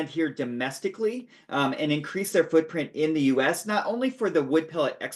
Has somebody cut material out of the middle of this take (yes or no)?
no